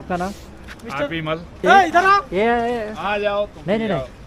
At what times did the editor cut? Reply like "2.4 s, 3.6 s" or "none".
none

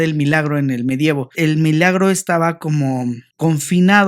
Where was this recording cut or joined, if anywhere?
1.3 s

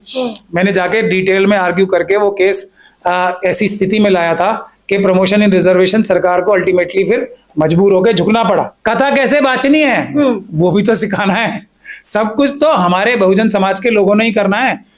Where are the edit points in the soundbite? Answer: 8.7 s

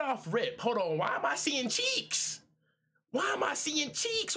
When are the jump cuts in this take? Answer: none

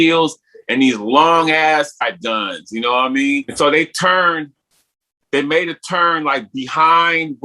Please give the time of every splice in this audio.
2.0 s, 3.5 s

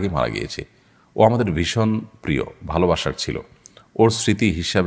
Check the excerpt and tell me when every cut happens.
none

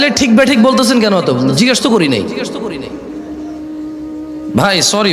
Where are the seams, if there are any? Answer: 2.9 s, 4.2 s

